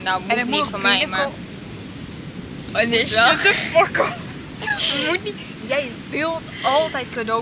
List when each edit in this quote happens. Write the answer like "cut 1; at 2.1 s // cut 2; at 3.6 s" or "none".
none